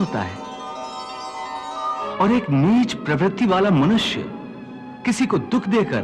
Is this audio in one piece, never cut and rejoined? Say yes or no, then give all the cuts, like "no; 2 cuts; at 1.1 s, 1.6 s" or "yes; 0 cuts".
no; 1 cut; at 2.1 s